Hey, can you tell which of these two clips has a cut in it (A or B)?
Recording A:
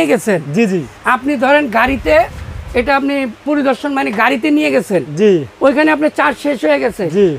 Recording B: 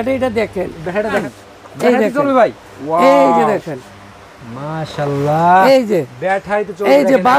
B